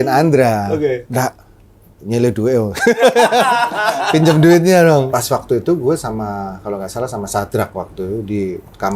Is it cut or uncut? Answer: cut